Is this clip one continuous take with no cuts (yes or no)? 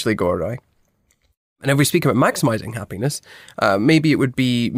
yes